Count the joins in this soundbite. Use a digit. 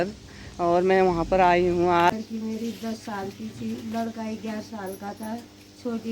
1